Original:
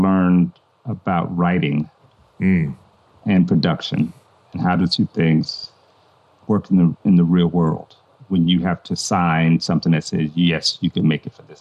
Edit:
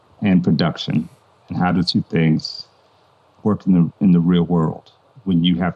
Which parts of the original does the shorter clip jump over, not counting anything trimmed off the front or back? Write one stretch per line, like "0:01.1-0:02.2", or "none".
none